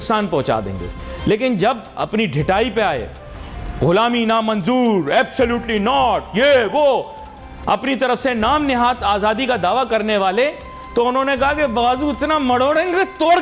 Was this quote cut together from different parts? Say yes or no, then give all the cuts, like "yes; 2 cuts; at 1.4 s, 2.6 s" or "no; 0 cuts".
no; 0 cuts